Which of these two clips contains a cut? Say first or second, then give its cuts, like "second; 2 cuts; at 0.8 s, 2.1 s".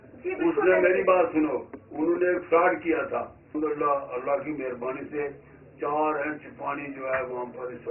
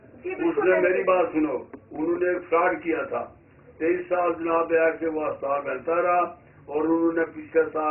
first; 1 cut; at 3.5 s